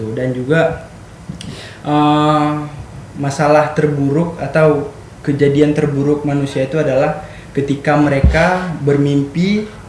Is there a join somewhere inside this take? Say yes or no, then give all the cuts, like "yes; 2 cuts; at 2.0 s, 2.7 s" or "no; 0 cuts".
no; 0 cuts